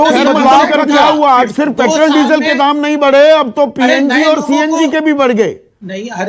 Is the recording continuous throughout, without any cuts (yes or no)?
no